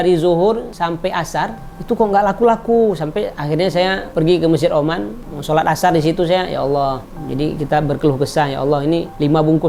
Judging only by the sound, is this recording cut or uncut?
uncut